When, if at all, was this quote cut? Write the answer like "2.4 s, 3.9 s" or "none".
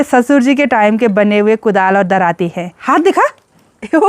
2.8 s